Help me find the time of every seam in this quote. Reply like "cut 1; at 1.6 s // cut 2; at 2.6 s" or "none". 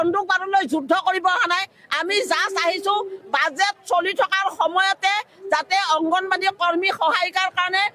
none